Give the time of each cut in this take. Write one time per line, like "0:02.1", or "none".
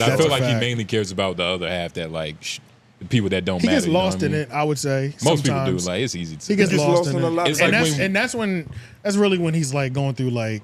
none